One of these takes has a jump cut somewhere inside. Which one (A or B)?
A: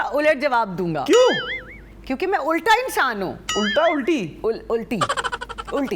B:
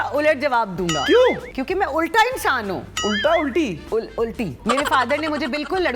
B